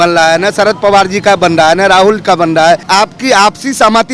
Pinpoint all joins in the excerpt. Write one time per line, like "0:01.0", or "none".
0:02.8